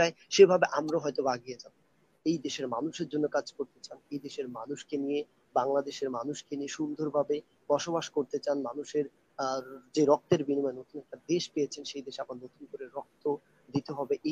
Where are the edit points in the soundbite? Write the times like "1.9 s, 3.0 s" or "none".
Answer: 2.1 s